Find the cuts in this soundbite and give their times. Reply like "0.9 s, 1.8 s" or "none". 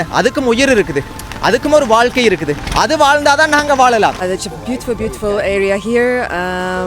4.2 s

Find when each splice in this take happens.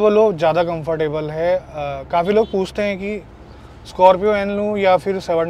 none

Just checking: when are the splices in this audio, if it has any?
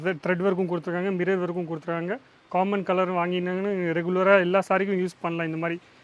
none

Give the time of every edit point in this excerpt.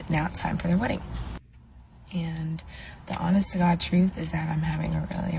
1.6 s

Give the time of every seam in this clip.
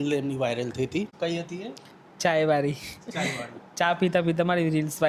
1.1 s

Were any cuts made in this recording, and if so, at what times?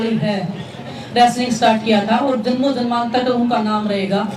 1.0 s

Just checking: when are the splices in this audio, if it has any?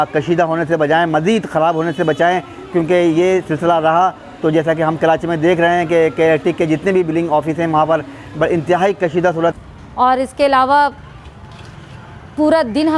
9.5 s

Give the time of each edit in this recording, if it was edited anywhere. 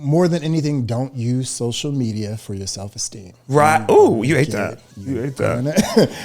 none

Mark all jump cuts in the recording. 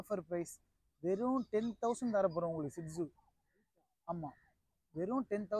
none

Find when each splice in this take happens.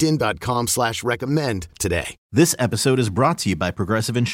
2.1 s

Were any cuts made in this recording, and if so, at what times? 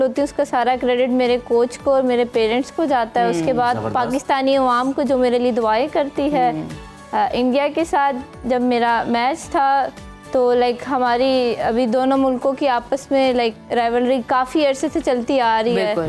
none

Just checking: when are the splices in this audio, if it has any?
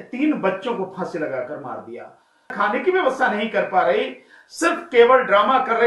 2.5 s

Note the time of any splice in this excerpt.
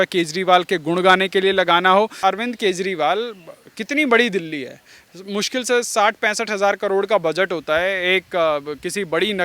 2.1 s

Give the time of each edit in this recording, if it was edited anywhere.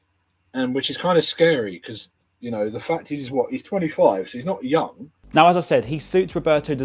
5.1 s

